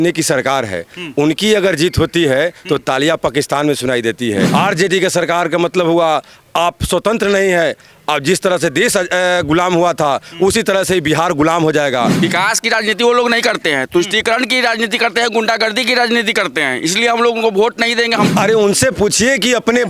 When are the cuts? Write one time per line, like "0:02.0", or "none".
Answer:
0:04.5
0:12.1
0:18.3